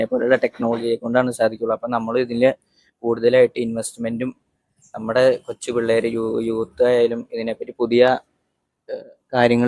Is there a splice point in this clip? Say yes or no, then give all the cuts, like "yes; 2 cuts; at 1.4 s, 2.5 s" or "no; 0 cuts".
no; 0 cuts